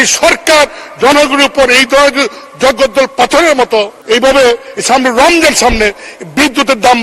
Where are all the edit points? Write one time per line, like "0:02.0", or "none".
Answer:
0:04.0